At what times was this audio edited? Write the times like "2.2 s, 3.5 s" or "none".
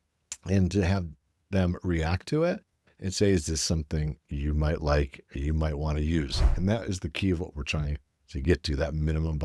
none